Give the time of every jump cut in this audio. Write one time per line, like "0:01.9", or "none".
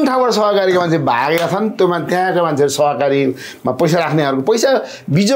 none